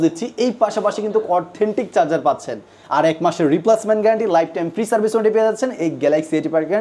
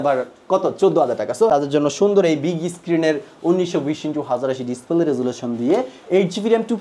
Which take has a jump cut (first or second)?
second